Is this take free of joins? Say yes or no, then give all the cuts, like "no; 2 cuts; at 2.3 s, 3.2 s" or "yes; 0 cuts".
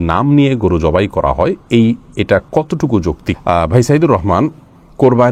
yes; 0 cuts